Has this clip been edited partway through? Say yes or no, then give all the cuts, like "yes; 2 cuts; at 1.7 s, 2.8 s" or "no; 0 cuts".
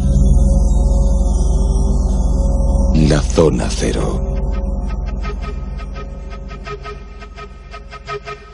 no; 0 cuts